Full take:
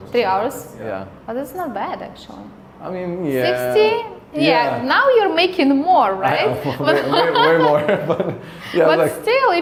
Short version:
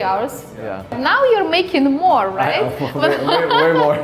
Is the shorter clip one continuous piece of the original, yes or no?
no